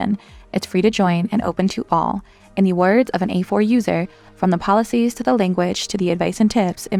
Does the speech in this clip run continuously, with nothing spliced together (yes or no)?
yes